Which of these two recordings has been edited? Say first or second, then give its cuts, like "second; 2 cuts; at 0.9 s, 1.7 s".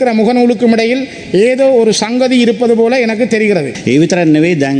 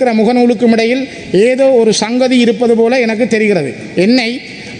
first; 1 cut; at 3.7 s